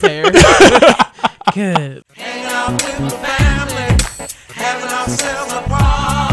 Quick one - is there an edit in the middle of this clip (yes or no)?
yes